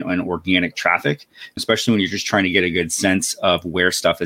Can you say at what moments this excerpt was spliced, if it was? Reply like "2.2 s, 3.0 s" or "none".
1.6 s